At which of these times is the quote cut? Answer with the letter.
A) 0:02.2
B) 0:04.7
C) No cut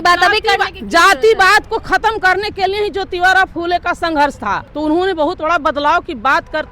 B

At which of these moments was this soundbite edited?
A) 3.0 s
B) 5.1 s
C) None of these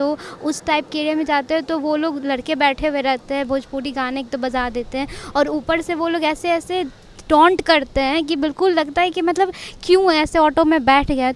C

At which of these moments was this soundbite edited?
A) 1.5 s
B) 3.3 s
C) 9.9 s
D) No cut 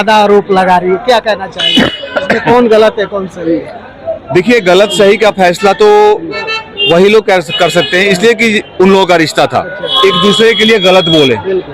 C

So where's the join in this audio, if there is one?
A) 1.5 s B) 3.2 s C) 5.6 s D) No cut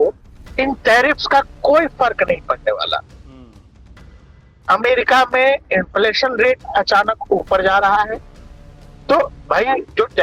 D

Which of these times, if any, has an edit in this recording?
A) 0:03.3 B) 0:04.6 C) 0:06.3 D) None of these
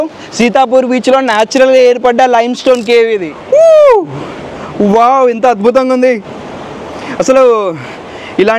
A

